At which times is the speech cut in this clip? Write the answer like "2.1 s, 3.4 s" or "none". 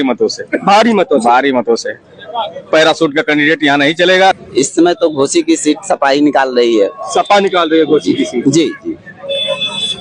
4.3 s